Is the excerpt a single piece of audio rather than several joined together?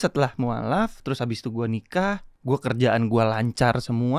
no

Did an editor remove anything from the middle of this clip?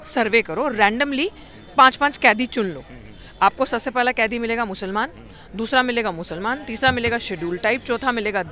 no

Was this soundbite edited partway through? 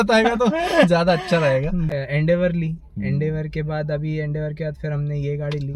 yes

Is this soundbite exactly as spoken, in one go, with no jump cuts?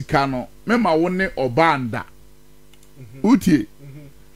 yes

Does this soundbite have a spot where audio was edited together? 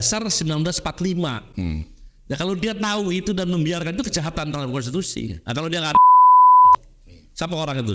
no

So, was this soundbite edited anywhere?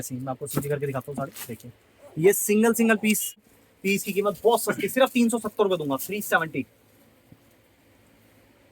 yes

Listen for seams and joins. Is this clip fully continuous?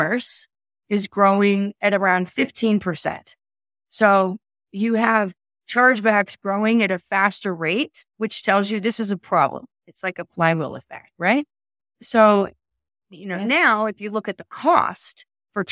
yes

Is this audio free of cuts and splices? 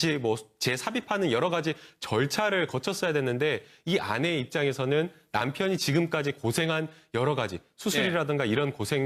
yes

